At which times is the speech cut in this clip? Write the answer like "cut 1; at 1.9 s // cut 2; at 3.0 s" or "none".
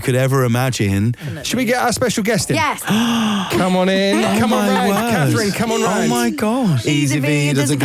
cut 1; at 1.3 s // cut 2; at 2.8 s // cut 3; at 6.8 s